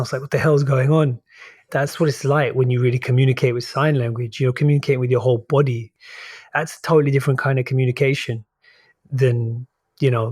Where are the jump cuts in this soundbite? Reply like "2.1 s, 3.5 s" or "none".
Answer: 1.9 s, 5.8 s